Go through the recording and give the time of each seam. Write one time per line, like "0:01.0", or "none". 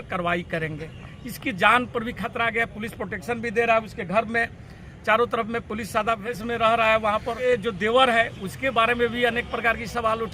0:06.2
0:07.4